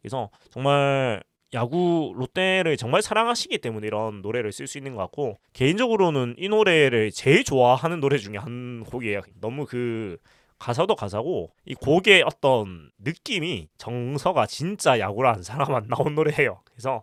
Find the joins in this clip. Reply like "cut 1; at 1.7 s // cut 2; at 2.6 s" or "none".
none

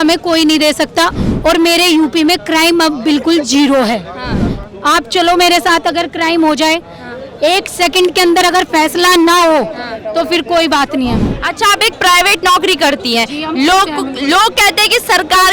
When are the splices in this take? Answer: cut 1; at 11.2 s

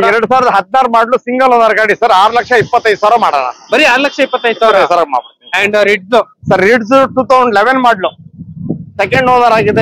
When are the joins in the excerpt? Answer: none

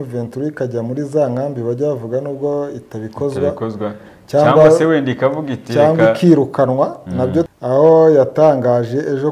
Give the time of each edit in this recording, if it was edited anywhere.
cut 1; at 7.5 s

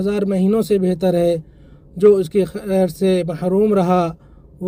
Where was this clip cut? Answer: none

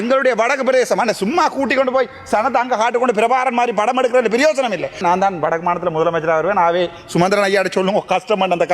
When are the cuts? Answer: cut 1; at 5.0 s

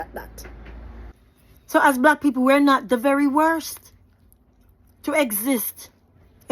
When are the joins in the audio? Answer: cut 1; at 1.1 s

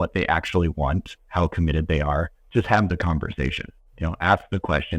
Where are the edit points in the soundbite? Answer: cut 1; at 2.4 s

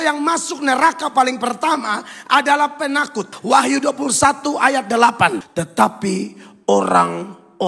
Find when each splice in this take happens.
cut 1; at 3.3 s // cut 2; at 5.4 s

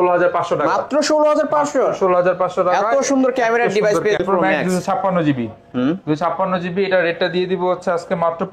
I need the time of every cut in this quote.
cut 1; at 4.2 s

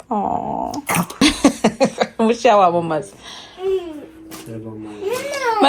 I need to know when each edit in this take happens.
cut 1; at 1.2 s

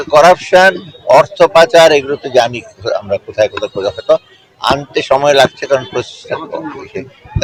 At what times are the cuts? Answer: none

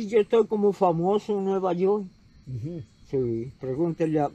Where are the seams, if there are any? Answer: none

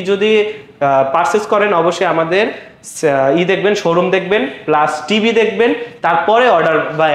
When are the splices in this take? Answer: none

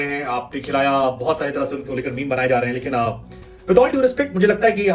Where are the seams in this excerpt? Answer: none

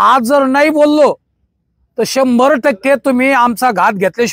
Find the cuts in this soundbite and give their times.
none

